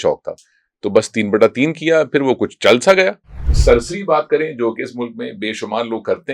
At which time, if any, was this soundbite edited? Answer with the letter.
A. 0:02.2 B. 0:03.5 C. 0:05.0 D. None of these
B